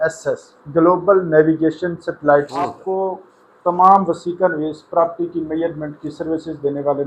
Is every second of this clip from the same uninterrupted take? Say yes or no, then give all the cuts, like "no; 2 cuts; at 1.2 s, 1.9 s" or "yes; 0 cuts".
no; 1 cut; at 2.8 s